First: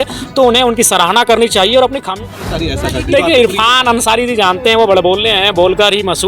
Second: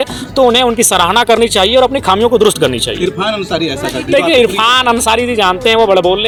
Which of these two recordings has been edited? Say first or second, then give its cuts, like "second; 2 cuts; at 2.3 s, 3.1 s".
first; 1 cut; at 2.1 s